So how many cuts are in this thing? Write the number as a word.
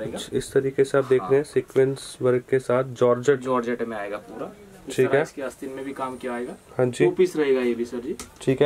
zero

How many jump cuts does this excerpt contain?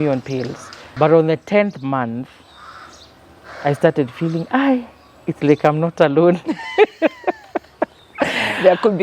one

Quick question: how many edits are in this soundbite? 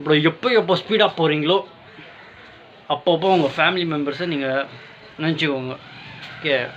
zero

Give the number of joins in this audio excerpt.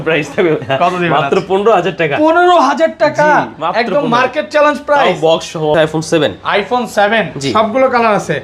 one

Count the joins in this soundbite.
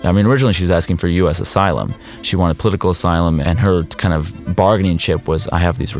one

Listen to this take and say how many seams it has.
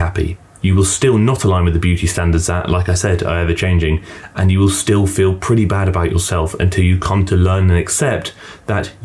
zero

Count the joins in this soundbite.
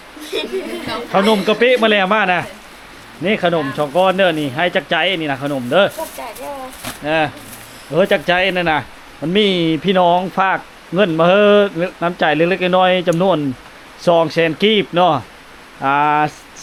zero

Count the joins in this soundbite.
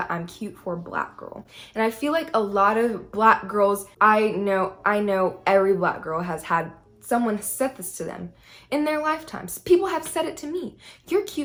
zero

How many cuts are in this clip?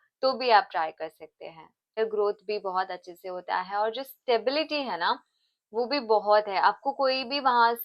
one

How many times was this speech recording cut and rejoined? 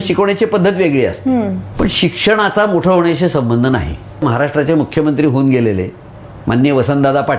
two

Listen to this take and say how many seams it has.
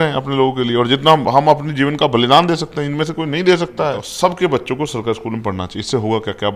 one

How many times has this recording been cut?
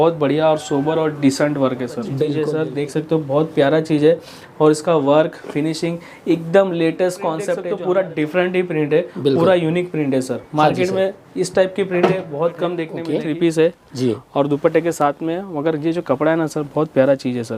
three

